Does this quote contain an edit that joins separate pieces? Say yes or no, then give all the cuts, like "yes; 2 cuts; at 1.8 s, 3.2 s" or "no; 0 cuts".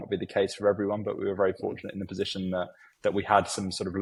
no; 0 cuts